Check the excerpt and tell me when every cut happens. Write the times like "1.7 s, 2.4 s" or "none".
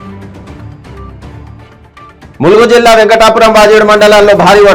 none